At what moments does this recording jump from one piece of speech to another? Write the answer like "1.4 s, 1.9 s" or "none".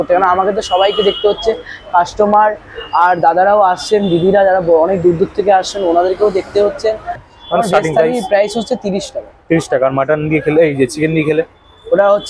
7.2 s